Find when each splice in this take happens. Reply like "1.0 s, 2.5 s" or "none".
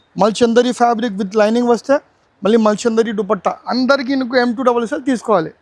none